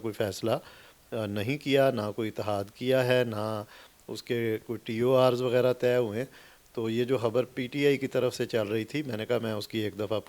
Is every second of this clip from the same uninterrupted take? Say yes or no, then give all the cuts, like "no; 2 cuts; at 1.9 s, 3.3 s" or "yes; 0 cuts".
yes; 0 cuts